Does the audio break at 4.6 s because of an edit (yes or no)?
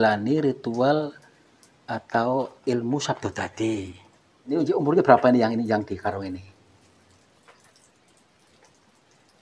yes